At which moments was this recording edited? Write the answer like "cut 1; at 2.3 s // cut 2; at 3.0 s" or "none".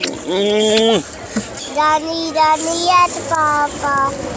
cut 1; at 1.5 s